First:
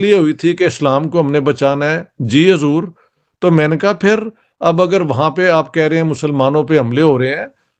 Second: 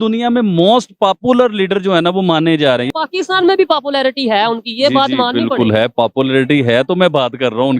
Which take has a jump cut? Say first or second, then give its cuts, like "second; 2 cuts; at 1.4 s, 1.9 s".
second; 1 cut; at 2.9 s